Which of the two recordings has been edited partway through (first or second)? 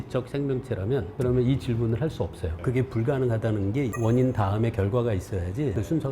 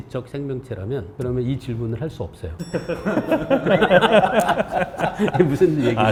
first